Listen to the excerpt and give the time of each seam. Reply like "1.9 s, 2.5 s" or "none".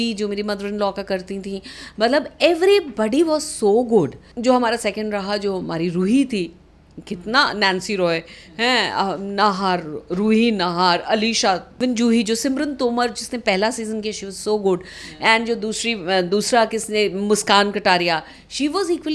4.2 s, 11.7 s

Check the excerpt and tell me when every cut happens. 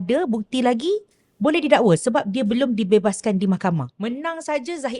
3.9 s

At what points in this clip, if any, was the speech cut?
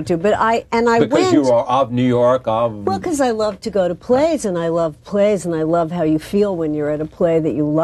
6.8 s

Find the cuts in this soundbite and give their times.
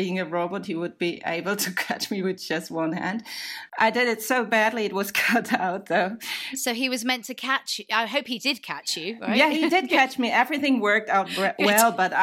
3.7 s, 6.5 s

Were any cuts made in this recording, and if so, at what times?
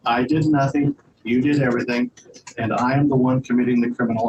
none

